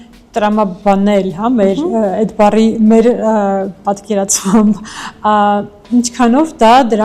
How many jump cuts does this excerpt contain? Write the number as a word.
zero